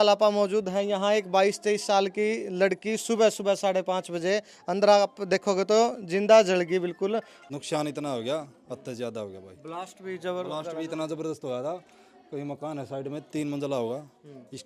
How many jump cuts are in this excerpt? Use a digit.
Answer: 1